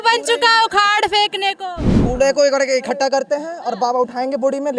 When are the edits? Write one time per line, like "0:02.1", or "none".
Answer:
none